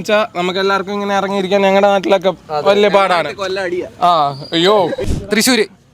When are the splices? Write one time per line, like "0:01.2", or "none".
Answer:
0:05.0